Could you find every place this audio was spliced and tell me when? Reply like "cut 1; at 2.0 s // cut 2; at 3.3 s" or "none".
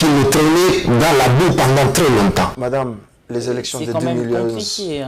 cut 1; at 2.6 s